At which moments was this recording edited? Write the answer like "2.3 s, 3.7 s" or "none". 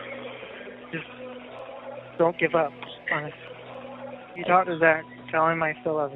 none